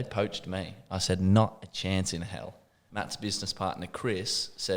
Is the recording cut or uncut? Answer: cut